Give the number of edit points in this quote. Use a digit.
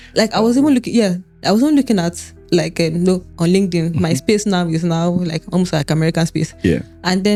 0